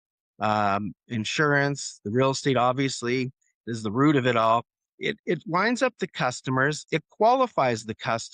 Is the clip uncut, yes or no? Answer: no